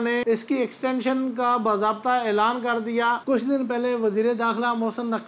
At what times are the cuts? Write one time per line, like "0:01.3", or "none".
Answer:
0:03.2